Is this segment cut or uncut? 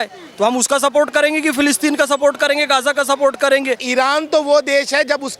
cut